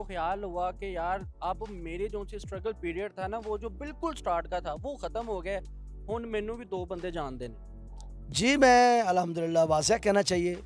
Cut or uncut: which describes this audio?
uncut